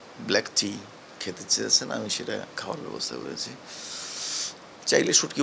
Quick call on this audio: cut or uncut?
uncut